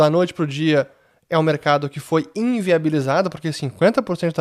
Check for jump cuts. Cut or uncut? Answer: uncut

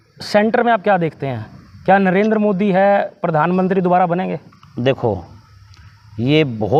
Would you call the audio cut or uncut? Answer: uncut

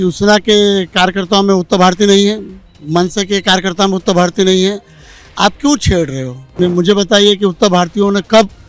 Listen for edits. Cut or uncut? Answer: cut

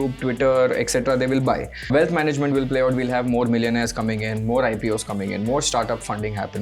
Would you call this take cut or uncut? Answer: cut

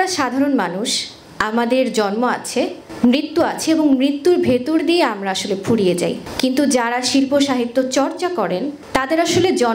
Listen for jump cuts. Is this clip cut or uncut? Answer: cut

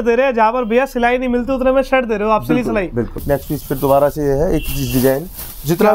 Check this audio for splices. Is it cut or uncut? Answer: cut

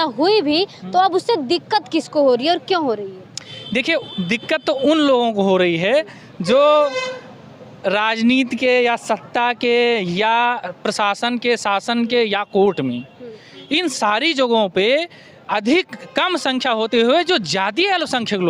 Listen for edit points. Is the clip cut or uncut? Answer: uncut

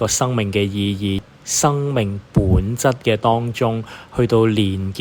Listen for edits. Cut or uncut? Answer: cut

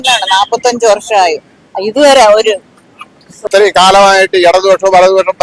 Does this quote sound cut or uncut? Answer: cut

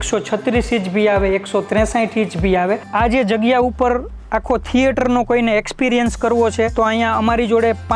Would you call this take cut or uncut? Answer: cut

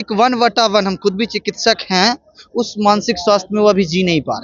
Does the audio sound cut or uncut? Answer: uncut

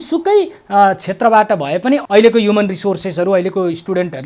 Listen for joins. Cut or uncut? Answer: cut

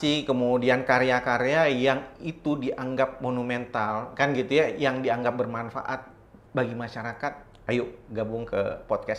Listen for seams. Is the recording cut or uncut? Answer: uncut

